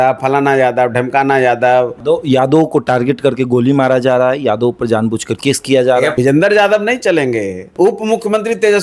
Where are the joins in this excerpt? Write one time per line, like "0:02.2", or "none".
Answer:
0:02.0
0:06.1
0:07.6

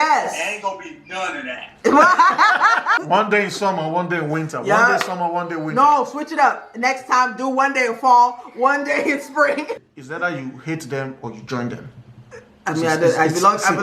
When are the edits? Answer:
0:03.0
0:09.9

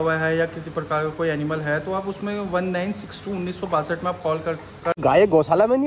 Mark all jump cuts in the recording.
0:04.9

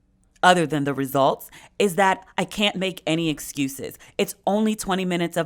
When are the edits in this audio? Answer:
none

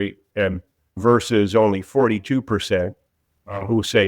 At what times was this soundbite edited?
0:01.0

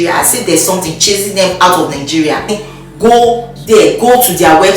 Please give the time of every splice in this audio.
0:02.5

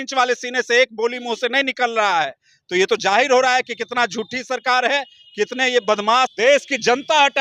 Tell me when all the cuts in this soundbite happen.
0:06.3

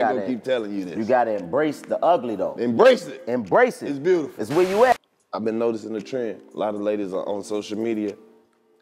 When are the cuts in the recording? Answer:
0:04.9

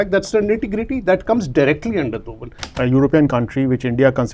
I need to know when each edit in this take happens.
0:02.7

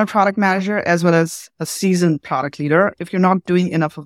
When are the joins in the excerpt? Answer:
0:02.9

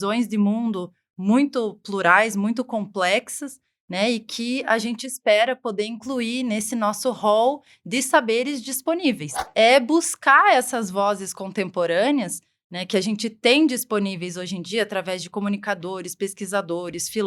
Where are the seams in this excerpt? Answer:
0:09.4

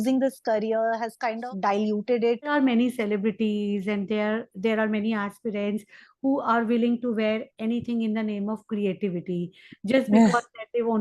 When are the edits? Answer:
0:01.5
0:02.4

